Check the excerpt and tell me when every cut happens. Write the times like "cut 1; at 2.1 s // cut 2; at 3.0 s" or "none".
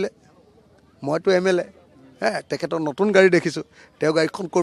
none

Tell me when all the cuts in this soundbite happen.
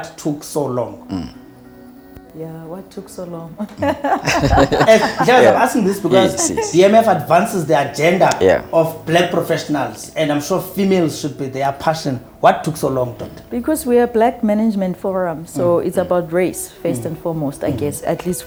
none

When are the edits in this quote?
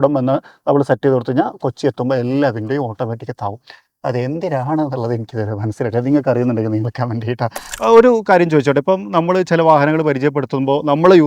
cut 1; at 7.6 s

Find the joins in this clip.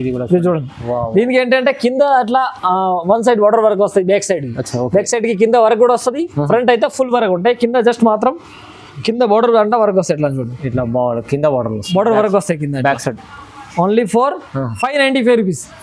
none

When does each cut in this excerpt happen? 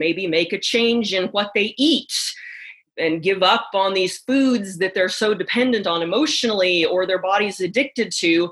cut 1; at 2.9 s

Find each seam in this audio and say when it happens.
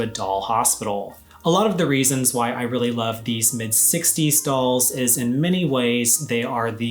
cut 1; at 1.2 s

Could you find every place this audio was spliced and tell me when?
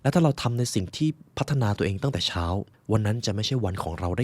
cut 1; at 2.7 s

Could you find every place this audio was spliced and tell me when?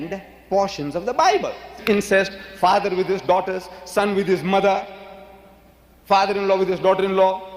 cut 1; at 1.8 s

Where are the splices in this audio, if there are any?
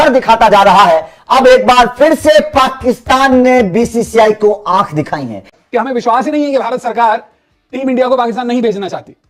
cut 1; at 5.5 s

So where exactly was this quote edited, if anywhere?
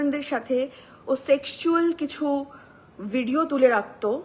none

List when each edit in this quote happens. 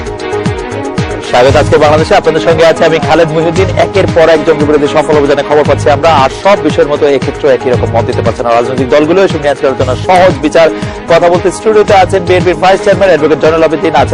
cut 1; at 1.1 s

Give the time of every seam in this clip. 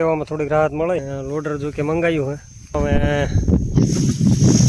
cut 1; at 1.1 s // cut 2; at 2.7 s

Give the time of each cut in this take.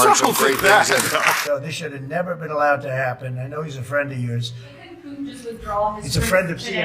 cut 1; at 1.6 s

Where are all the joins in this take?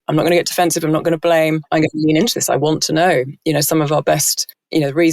cut 1; at 1.6 s

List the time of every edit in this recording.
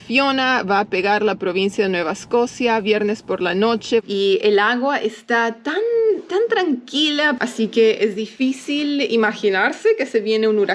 cut 1; at 4.0 s // cut 2; at 7.4 s

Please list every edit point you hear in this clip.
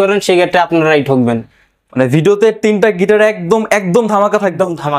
none

